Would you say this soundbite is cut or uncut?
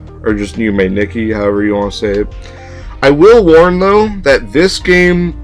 cut